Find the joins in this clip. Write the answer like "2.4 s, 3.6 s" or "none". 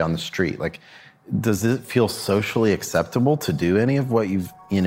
1.2 s